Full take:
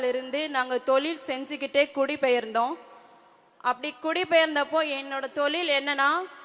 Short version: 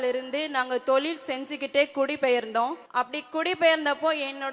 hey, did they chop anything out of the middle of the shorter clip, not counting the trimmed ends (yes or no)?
yes